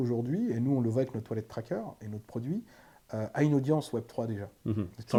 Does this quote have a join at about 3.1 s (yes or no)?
no